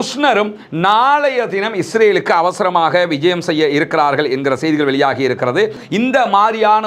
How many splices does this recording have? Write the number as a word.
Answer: one